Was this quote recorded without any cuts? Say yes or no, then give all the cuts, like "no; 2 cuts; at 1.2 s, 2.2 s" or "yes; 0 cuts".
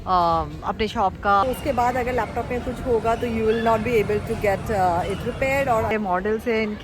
no; 2 cuts; at 1.4 s, 5.9 s